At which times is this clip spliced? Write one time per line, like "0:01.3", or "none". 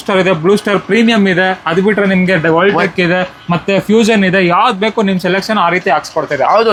none